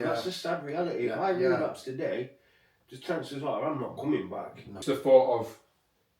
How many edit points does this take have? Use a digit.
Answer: 1